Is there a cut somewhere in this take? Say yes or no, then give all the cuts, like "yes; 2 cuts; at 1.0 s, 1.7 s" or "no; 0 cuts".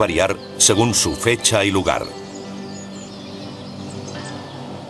no; 0 cuts